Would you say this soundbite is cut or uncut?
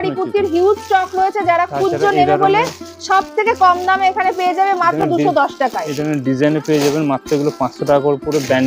uncut